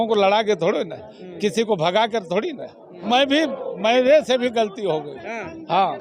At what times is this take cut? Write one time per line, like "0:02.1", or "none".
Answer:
0:03.0